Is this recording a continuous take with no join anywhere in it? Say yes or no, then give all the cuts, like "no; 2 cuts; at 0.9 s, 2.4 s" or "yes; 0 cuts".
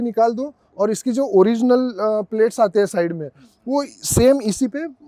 yes; 0 cuts